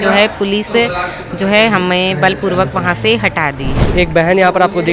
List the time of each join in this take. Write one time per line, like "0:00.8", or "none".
0:03.9